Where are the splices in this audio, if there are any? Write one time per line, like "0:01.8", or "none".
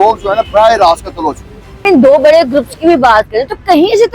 0:01.8